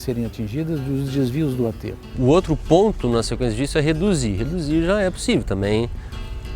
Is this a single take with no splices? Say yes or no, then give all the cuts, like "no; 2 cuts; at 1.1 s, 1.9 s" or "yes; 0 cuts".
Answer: no; 1 cut; at 2.1 s